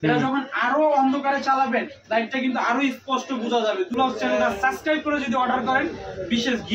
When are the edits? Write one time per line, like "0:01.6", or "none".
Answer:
0:03.9